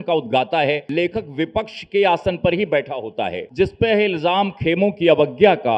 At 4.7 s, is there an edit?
no; 2 cuts; at 0.8 s, 3.4 s

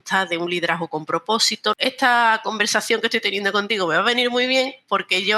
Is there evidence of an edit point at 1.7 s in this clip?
yes; 1 cut; at 1.7 s

